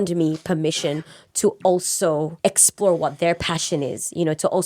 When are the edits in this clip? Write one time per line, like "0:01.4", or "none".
0:02.3